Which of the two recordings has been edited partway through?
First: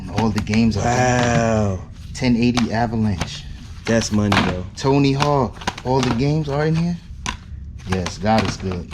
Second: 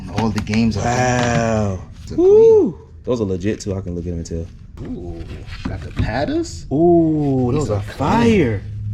second; 2 cuts; at 2.0 s, 4.6 s

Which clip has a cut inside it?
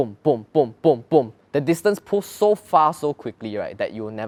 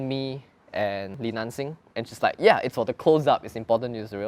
second; 1 cut; at 1.6 s

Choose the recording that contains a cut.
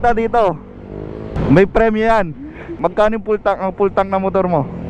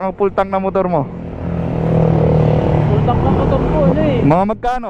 first; 2 cuts; at 1.3 s, 2.7 s

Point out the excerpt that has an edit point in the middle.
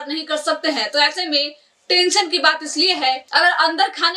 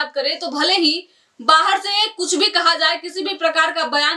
first; 1 cut; at 3.2 s

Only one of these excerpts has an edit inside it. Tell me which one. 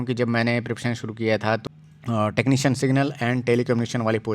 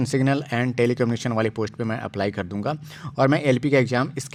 first; 1 cut; at 1.6 s

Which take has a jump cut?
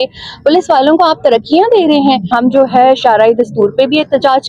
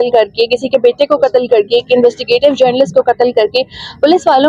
first; 1 cut; at 2.3 s

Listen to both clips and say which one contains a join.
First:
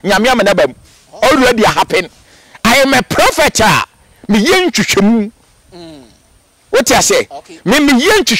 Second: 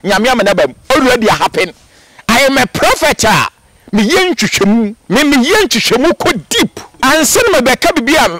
second; 3 cuts; at 0.8 s, 5.0 s, 6.8 s

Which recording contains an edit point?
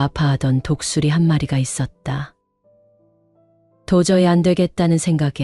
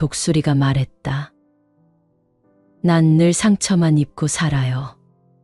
first; 2 cuts; at 2.4 s, 3.7 s

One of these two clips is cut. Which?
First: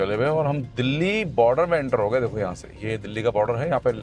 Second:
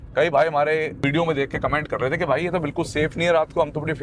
second; 1 cut; at 0.9 s

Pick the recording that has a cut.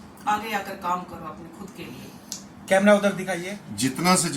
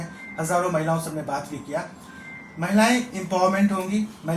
first; 1 cut; at 3.3 s

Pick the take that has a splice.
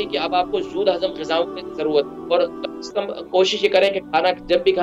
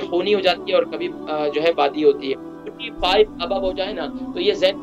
second; 1 cut; at 2.5 s

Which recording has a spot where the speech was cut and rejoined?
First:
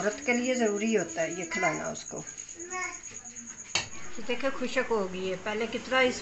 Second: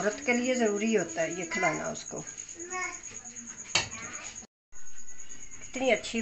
first; 1 cut; at 4.0 s

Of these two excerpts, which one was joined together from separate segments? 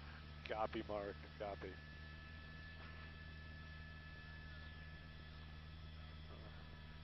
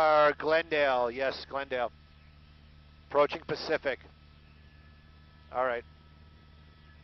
second; 1 cut; at 3.8 s

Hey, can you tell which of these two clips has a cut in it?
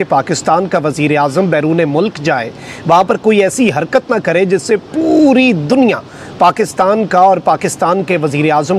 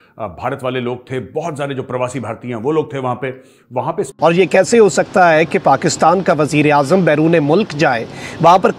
second; 1 cut; at 4.1 s

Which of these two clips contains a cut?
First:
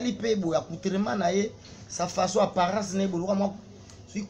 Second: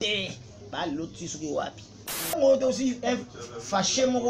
second; 1 cut; at 2.3 s

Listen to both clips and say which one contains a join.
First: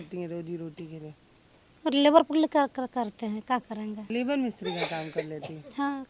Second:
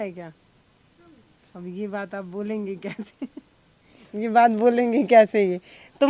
first; 1 cut; at 4.0 s

